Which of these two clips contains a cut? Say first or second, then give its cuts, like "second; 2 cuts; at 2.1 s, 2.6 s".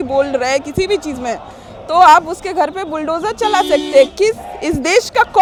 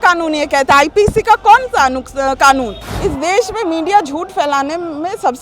second; 1 cut; at 2.8 s